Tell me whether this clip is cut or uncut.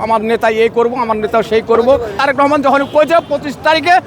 cut